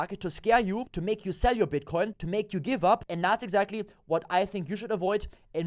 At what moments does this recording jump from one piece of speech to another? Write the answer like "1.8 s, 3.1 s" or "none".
0.9 s, 2.2 s, 3.0 s